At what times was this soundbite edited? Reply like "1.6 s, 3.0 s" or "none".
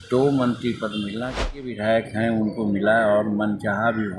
1.6 s

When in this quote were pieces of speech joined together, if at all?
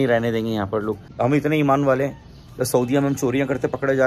1.1 s

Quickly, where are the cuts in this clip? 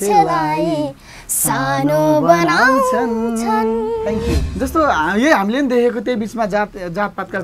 4.5 s

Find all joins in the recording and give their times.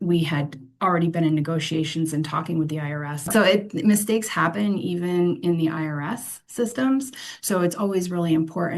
3.2 s

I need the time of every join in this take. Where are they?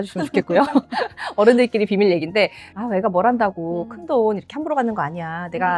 2.7 s

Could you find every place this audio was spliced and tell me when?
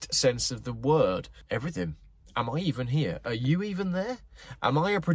1.3 s

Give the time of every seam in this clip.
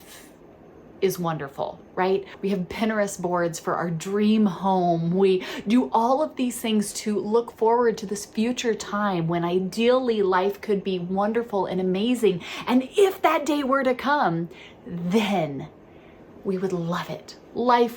2.3 s

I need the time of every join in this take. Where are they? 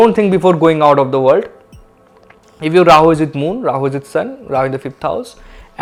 none

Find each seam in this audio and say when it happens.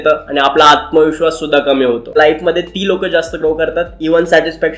2.1 s

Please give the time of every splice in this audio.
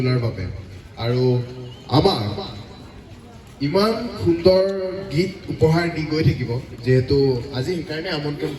none

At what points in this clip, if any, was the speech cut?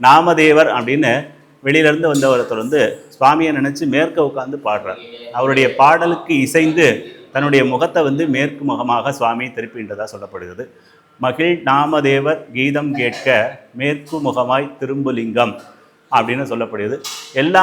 none

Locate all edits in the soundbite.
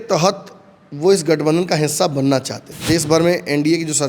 2.7 s

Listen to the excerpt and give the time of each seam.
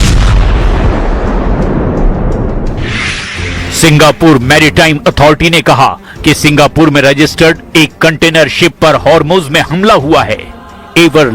6.9 s

